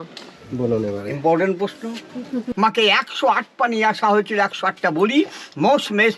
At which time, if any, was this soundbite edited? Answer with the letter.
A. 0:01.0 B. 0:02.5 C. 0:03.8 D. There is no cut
B